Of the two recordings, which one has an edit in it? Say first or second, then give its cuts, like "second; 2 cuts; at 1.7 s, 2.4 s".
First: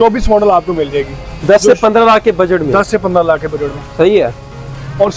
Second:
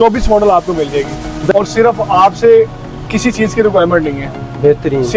second; 1 cut; at 1.5 s